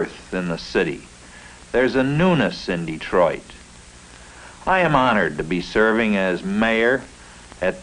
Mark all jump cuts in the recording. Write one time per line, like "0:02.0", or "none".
none

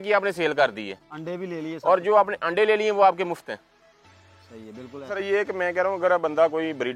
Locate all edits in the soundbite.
0:05.1

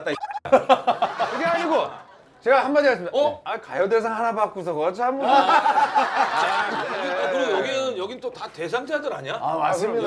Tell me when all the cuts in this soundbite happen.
0:01.3
0:06.9

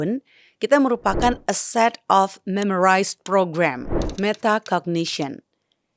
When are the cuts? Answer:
0:04.0

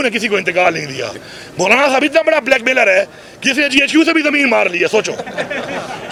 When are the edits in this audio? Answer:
none

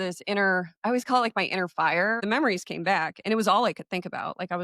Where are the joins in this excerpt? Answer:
0:02.2

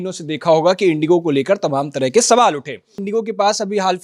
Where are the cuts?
0:02.9

